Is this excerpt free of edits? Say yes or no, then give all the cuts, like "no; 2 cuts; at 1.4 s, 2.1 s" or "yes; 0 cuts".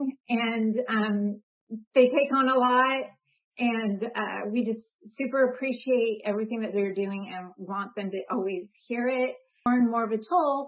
no; 1 cut; at 9.6 s